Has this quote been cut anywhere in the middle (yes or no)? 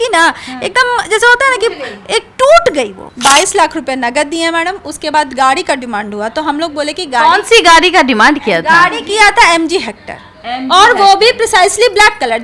yes